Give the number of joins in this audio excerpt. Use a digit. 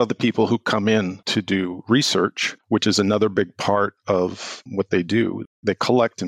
1